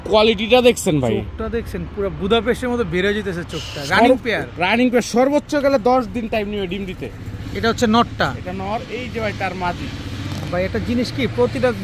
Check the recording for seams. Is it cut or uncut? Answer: uncut